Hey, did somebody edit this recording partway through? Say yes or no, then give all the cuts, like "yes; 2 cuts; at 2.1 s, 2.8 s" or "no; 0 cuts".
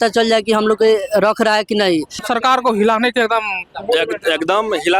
yes; 1 cut; at 2.2 s